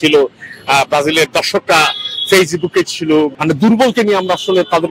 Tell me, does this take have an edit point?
yes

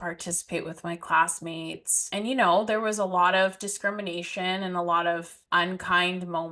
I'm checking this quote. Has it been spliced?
yes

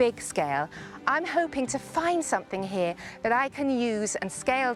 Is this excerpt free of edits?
yes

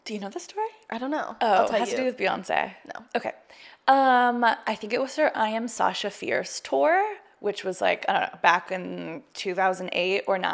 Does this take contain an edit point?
no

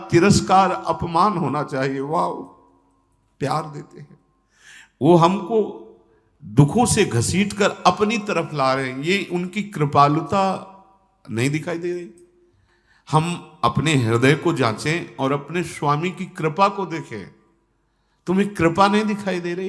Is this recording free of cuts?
yes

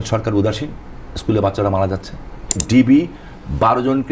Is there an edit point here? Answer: yes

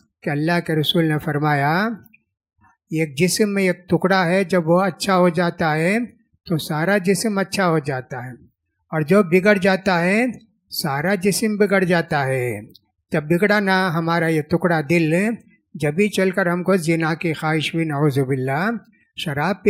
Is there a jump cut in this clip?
no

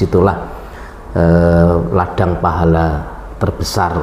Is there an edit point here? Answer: no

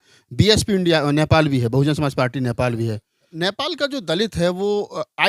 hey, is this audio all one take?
no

